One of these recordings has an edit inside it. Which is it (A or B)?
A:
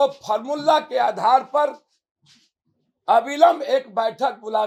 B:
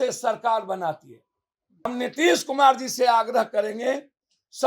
B